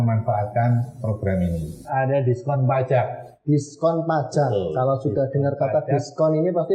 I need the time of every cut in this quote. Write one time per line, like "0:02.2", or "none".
0:01.8